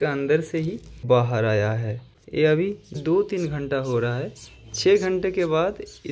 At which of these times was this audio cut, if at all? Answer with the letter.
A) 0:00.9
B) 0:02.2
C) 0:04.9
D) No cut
A